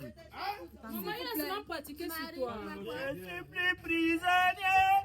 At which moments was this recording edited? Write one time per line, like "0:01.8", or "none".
0:02.7

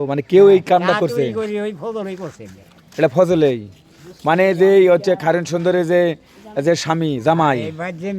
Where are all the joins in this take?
none

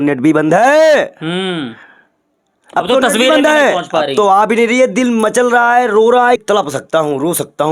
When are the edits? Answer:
0:06.4

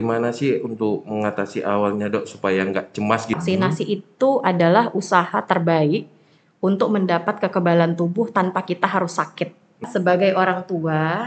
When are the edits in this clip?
0:03.4
0:09.8

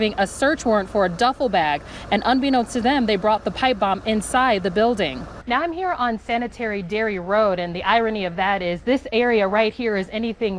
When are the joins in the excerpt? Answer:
0:05.3

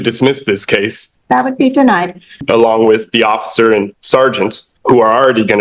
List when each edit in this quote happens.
0:01.0
0:02.4
0:04.7

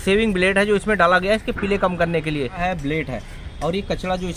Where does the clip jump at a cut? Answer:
0:02.6

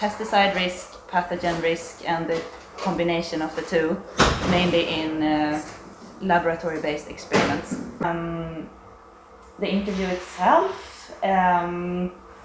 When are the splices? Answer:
0:08.0

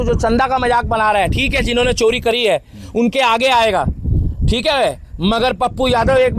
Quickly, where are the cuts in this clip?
none

